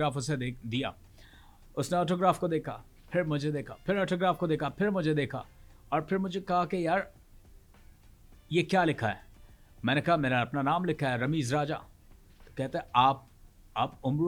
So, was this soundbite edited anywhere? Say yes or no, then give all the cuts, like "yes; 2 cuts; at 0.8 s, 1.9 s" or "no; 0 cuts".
no; 0 cuts